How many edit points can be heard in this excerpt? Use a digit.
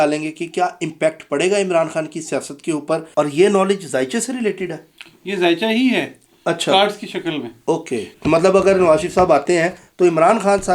2